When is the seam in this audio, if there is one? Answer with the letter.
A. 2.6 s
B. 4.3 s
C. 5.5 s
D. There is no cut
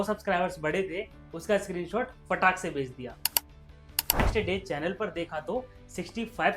B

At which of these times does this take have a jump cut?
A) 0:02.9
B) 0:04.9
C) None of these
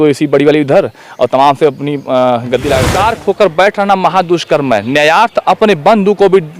A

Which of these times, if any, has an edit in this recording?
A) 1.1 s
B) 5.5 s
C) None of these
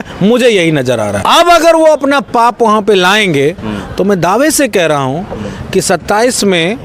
A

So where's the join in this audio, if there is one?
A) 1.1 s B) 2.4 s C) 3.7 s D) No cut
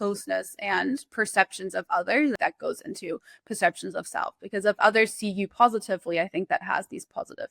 B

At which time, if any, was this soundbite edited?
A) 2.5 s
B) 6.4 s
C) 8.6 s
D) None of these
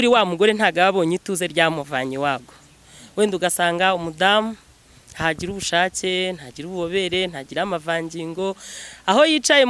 A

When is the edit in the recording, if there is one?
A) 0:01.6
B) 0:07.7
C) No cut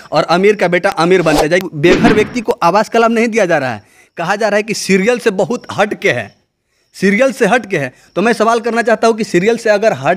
A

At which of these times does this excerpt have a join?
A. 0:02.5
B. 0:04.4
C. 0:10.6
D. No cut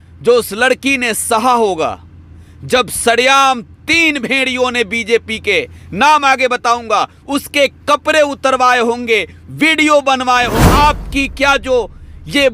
C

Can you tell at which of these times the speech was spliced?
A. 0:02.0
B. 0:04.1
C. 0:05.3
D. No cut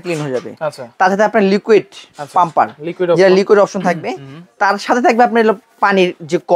D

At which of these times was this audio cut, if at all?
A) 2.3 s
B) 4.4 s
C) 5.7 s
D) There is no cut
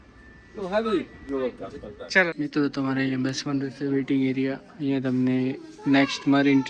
A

